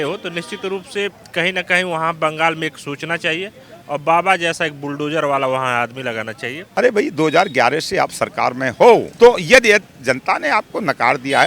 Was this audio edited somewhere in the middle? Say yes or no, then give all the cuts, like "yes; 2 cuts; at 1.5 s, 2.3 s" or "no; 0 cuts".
yes; 2 cuts; at 6.6 s, 9.1 s